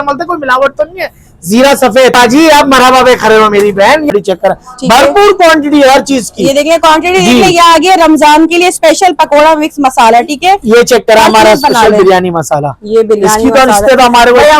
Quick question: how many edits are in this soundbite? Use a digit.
2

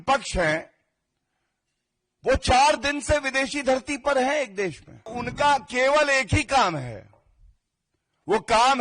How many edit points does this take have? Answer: 1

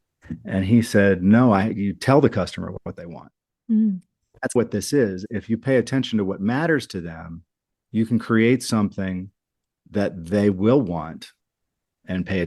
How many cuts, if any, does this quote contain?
1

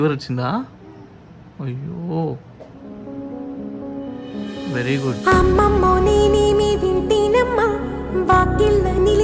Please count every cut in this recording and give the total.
0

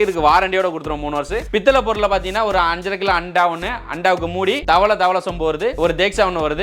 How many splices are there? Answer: 0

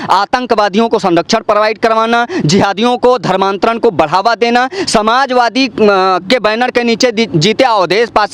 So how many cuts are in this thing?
0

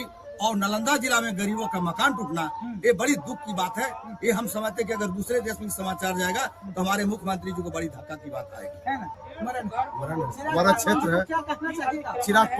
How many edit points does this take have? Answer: 1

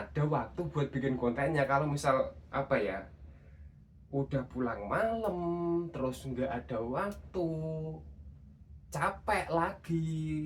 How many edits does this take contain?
0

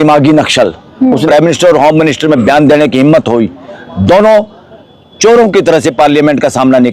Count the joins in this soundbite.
1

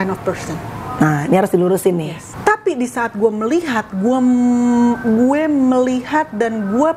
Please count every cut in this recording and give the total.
1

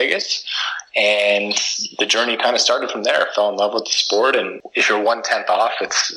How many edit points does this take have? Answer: 1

